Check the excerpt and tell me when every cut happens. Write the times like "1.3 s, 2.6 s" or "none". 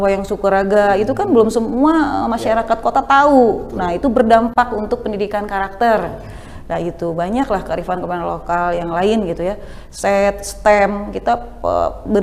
none